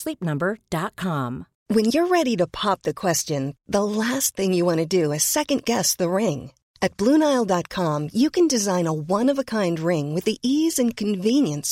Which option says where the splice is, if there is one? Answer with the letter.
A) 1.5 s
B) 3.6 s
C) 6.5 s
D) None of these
A